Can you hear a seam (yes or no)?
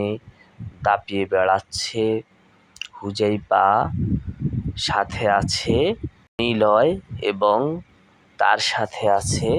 yes